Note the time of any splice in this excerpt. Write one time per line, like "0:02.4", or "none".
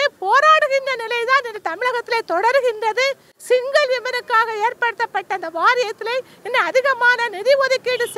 none